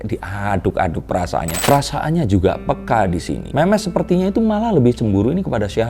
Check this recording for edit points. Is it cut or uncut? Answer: cut